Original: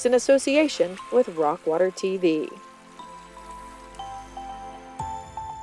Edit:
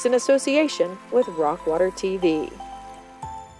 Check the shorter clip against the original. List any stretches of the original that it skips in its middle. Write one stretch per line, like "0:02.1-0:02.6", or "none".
0:02.5-0:04.3